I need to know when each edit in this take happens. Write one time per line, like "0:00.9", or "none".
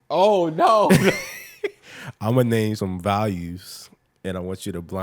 0:02.8